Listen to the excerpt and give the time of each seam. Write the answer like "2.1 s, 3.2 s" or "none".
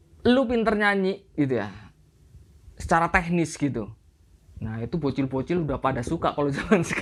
none